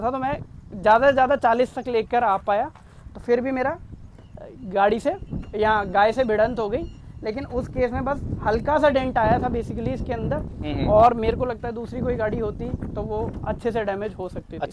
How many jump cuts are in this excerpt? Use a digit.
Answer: 0